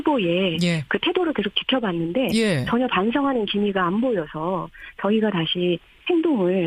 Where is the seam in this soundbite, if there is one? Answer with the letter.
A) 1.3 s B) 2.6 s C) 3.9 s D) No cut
C